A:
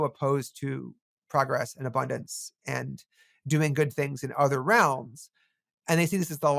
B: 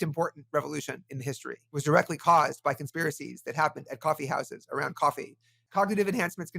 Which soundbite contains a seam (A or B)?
B